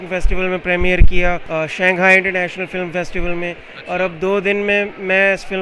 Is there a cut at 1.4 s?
yes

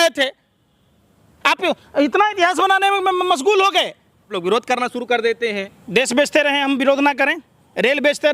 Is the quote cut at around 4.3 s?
yes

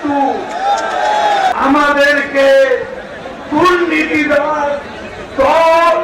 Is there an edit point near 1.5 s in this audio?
yes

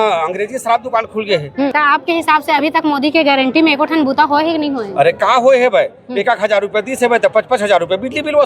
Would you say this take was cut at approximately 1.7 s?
yes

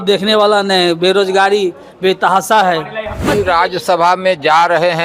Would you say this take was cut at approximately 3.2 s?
yes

